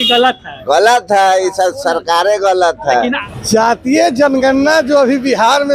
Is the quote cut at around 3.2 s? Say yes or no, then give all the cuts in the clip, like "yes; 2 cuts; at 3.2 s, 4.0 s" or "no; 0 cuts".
yes; 1 cut; at 3.2 s